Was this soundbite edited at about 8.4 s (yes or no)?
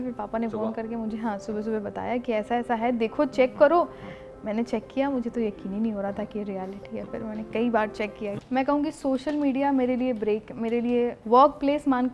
yes